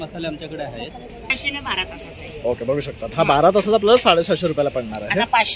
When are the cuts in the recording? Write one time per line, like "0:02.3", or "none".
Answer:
0:01.4